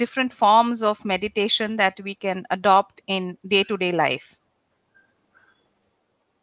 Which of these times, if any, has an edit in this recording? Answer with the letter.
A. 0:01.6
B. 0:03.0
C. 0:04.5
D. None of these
D